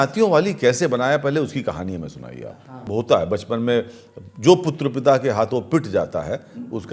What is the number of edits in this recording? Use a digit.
1